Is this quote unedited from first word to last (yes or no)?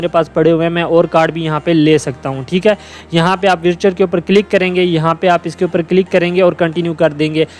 yes